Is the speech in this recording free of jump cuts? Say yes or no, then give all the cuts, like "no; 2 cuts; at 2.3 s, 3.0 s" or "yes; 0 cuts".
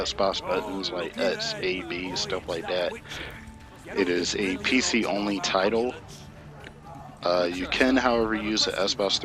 no; 1 cut; at 3.1 s